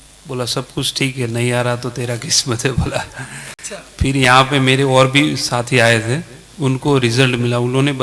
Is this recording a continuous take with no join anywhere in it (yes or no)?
yes